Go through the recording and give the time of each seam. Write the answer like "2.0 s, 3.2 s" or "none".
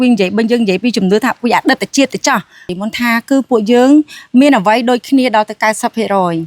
2.7 s